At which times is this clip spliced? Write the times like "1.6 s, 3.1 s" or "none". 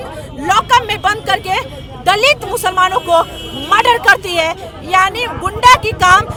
none